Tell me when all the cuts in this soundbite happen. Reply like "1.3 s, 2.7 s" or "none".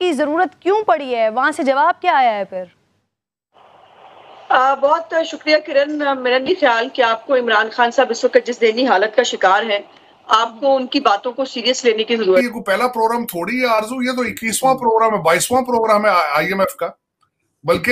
12.5 s